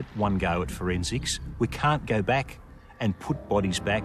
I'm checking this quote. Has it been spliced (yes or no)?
no